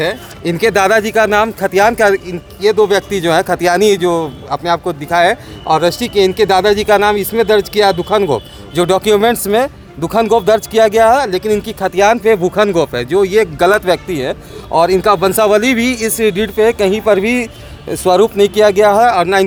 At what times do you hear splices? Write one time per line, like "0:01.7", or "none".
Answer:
none